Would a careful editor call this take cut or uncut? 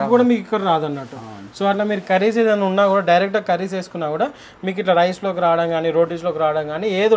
uncut